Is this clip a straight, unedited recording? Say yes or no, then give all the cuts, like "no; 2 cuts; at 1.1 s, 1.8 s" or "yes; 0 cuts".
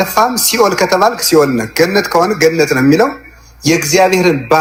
yes; 0 cuts